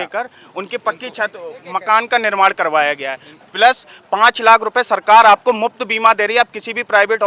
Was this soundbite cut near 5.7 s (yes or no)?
no